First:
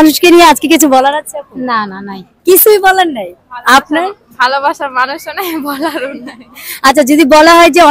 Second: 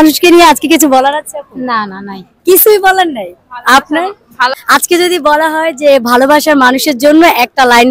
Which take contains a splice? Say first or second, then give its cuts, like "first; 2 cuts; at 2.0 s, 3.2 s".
second; 1 cut; at 4.5 s